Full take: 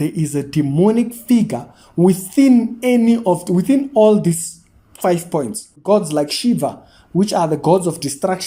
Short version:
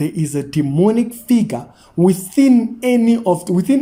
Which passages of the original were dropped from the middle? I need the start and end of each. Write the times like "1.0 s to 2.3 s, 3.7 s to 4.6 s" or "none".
none